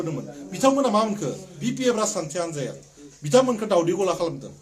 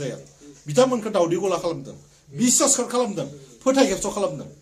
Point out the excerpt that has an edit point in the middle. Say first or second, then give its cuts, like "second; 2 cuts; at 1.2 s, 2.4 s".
first; 1 cut; at 1.5 s